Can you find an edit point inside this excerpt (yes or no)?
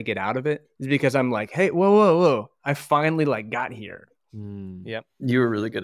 no